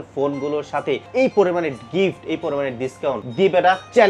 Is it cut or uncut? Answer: cut